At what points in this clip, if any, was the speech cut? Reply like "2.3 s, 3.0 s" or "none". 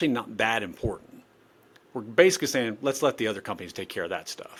none